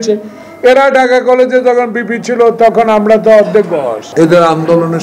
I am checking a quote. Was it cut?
yes; 1 cut; at 4.0 s

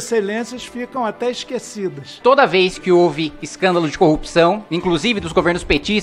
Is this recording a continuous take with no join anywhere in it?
no; 1 cut; at 2.2 s

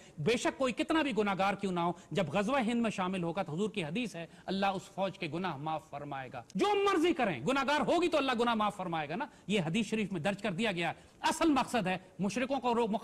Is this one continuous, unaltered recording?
no; 1 cut; at 6.4 s

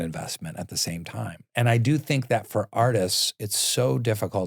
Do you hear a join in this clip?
yes; 1 cut; at 1.4 s

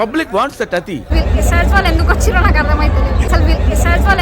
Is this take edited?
yes; 2 cuts; at 1.1 s, 3.3 s

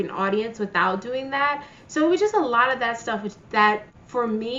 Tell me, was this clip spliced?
no; 0 cuts

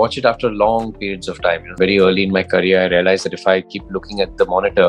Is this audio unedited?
no; 1 cut; at 1.7 s

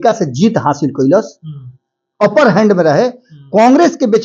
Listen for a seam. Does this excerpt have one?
no; 0 cuts

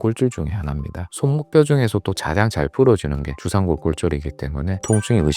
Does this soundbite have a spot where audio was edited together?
yes; 1 cut; at 1.1 s

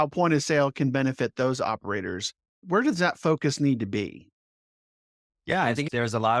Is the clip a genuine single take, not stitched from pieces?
no; 1 cut; at 2.6 s

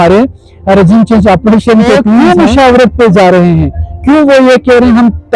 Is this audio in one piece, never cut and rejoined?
no; 1 cut; at 2.2 s

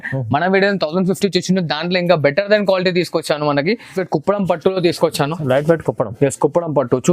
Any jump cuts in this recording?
yes; 1 cut; at 4.0 s

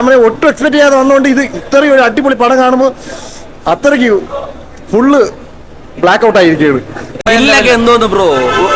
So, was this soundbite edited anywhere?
yes; 1 cut; at 7.2 s

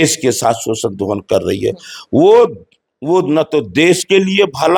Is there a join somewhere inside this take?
no; 0 cuts

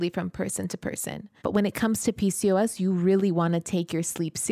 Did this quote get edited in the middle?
yes; 1 cut; at 1.3 s

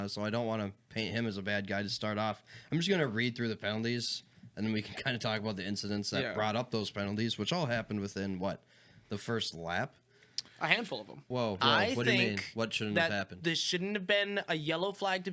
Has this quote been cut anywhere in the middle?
yes; 1 cut; at 11.2 s

